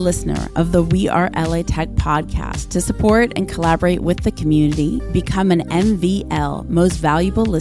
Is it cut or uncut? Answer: uncut